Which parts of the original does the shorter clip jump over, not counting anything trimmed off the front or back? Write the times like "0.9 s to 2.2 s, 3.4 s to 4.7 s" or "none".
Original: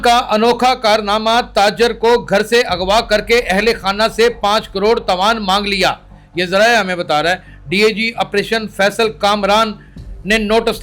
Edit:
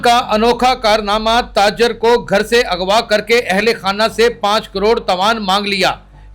none